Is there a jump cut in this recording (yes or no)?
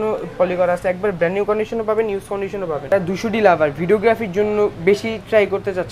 yes